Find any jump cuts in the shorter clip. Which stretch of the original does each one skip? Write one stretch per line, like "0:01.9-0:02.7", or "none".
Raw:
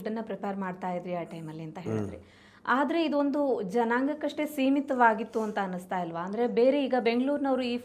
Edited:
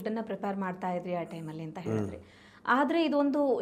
none